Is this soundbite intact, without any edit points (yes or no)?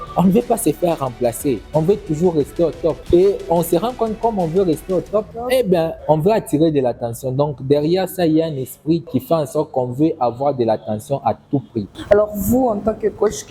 yes